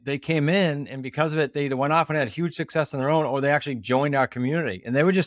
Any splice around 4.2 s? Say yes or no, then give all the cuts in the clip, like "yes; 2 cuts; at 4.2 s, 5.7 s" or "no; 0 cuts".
no; 0 cuts